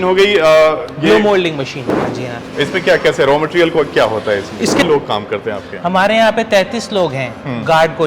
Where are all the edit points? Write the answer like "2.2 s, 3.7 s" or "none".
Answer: 2.1 s, 4.8 s